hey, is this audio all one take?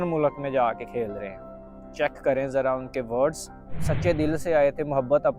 no; 1 cut; at 3.8 s

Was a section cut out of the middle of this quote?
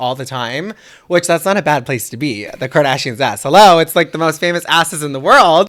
no; 0 cuts

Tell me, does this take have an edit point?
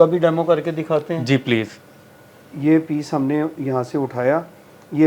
no; 0 cuts

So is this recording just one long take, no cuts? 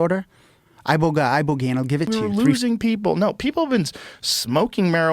no; 1 cut; at 2.1 s

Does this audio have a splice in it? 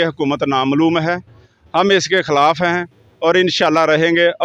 no; 0 cuts

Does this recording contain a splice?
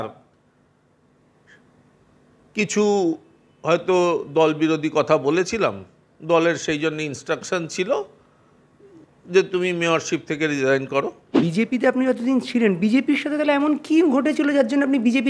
yes; 1 cut; at 11.4 s

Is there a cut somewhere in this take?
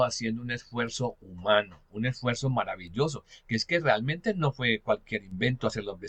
no; 0 cuts

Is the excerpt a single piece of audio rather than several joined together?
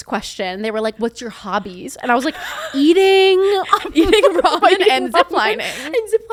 yes; 0 cuts

